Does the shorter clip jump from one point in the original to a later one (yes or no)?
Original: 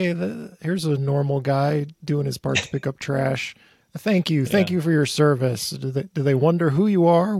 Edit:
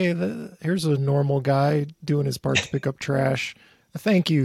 no